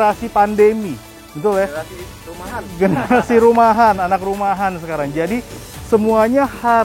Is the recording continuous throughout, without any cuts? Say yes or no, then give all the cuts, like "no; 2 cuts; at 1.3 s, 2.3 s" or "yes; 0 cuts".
yes; 0 cuts